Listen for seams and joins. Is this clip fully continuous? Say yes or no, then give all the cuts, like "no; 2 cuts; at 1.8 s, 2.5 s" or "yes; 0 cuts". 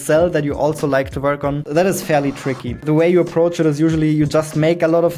no; 2 cuts; at 1.6 s, 2.8 s